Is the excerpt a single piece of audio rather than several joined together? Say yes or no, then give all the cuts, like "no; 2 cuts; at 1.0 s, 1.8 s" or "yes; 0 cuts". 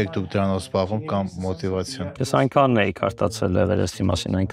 yes; 0 cuts